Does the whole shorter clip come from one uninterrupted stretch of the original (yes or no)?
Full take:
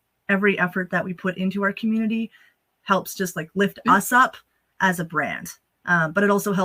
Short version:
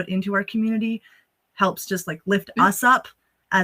yes